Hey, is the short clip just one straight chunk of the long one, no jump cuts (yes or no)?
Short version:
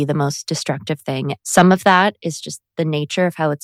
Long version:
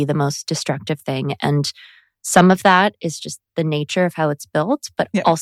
no